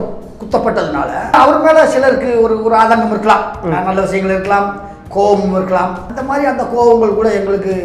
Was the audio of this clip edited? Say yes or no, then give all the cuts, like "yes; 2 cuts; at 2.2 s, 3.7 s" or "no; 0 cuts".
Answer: yes; 2 cuts; at 1.3 s, 6.1 s